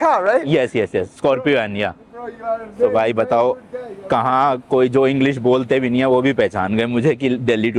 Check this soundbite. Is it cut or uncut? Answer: uncut